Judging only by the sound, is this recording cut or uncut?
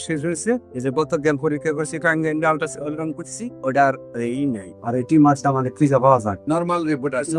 uncut